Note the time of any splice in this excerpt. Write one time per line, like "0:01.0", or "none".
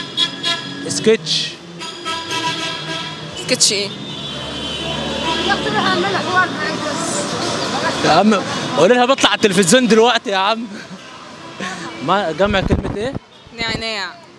none

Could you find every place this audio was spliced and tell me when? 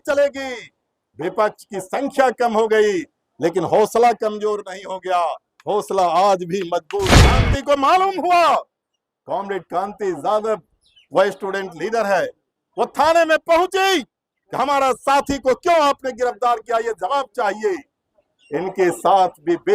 0:07.4

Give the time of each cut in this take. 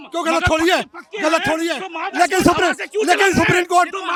none

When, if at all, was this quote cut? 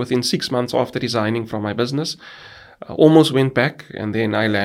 none

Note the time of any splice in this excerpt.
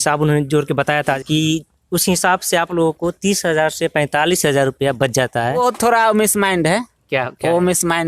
0:01.2
0:05.6

